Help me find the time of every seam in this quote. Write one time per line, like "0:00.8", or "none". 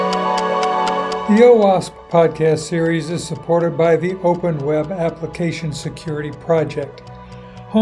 0:01.2